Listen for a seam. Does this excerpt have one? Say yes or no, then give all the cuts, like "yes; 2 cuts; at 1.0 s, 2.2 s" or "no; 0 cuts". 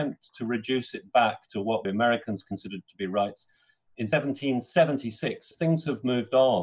yes; 3 cuts; at 1.8 s, 4.1 s, 5.5 s